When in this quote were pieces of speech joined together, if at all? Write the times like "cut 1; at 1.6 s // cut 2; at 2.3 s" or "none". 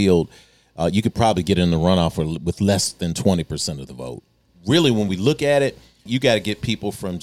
cut 1; at 4.4 s // cut 2; at 6.0 s